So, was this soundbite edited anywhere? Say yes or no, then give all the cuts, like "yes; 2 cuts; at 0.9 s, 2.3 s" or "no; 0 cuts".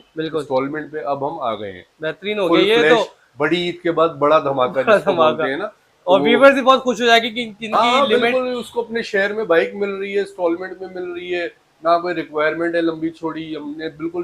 no; 0 cuts